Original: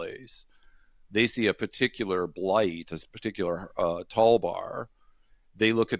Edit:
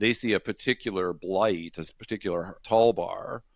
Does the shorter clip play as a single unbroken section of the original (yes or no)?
no